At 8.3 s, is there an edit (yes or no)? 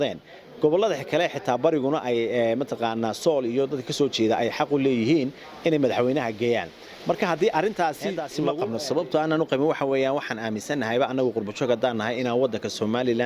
yes